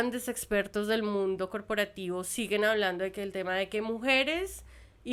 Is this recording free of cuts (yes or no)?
yes